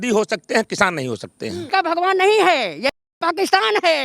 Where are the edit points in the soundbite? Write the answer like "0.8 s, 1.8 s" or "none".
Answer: 1.6 s